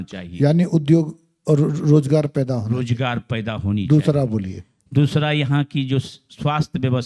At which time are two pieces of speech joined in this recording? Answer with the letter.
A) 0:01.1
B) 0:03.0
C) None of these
C